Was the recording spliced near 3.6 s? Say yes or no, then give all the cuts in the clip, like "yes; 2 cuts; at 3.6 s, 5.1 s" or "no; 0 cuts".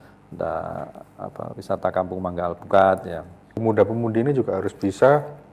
yes; 1 cut; at 3.6 s